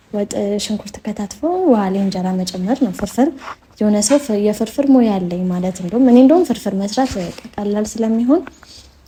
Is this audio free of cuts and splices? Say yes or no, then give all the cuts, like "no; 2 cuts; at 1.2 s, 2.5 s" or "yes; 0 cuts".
yes; 0 cuts